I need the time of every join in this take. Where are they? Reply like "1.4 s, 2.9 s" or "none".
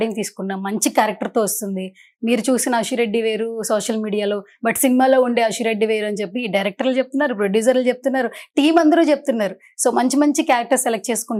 none

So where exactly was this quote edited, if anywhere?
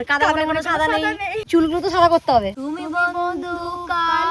1.4 s, 2.6 s

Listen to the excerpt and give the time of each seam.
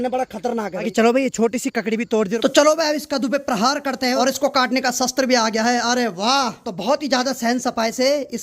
0.9 s, 2.3 s, 4.2 s, 6.6 s

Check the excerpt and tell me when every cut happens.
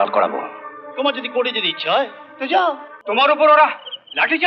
2.9 s

